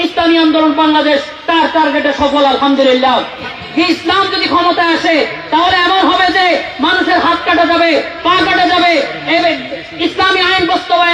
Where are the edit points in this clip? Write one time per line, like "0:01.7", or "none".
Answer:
0:03.6